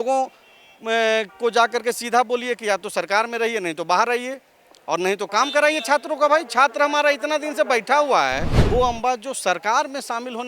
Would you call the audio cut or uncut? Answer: cut